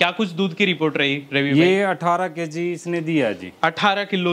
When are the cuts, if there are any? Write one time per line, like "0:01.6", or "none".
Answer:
none